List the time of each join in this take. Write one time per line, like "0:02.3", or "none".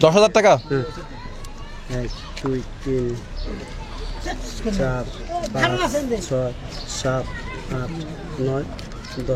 none